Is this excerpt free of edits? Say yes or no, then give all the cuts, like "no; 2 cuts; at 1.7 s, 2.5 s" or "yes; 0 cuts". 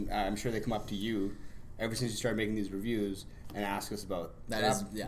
no; 1 cut; at 0.9 s